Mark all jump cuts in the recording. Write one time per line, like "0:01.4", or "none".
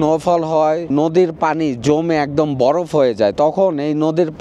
none